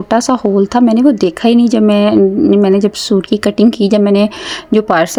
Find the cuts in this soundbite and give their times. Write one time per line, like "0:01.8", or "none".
none